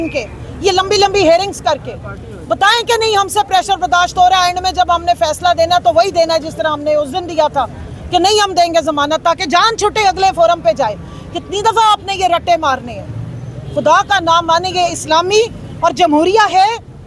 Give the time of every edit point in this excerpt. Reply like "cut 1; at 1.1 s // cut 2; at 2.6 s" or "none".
none